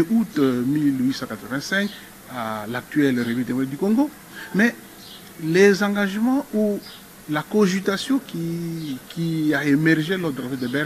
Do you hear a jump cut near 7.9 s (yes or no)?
no